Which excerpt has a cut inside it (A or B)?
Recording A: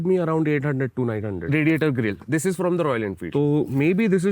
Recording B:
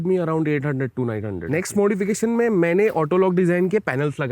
A